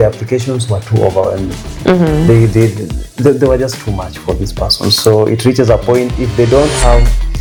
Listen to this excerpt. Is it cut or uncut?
uncut